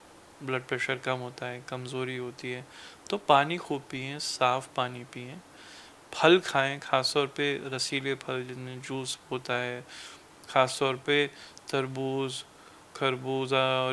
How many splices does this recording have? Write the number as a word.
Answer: zero